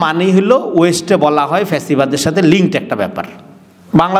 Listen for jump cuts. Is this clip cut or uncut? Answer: uncut